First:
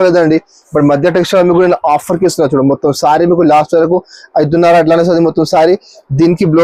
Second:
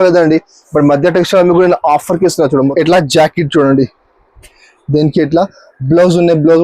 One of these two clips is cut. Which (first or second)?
second